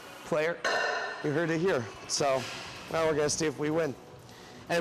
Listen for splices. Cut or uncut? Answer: uncut